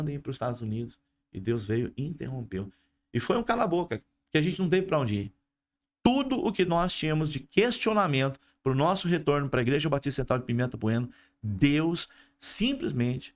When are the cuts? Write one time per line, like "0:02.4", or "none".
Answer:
none